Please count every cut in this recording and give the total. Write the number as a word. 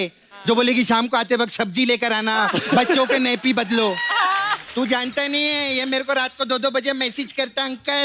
one